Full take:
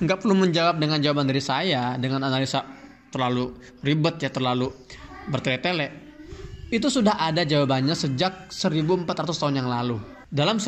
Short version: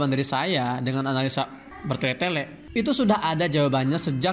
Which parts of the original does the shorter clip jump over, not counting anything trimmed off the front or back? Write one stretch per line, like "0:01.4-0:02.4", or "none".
0:02.8-0:05.1
0:06.0-0:06.5